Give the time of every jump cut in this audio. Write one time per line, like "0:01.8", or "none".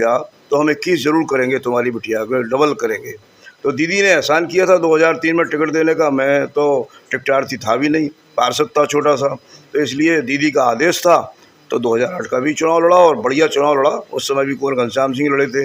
none